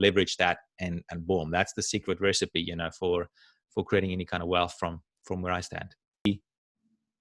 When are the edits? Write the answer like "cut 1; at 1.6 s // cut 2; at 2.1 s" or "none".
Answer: cut 1; at 6.3 s